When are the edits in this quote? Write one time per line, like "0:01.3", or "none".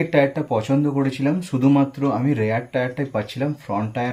none